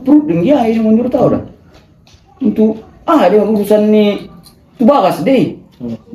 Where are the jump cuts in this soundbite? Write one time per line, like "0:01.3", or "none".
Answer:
none